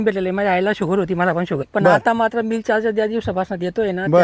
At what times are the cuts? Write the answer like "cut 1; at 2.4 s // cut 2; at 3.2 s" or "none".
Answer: cut 1; at 1.6 s